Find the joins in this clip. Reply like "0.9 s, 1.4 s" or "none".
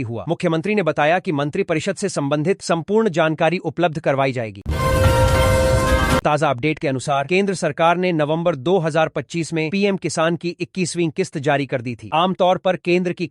4.5 s, 6.2 s, 7.3 s